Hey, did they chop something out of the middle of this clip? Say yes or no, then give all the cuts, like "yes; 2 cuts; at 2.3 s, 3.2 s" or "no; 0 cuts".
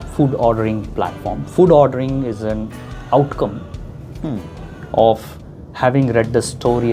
no; 0 cuts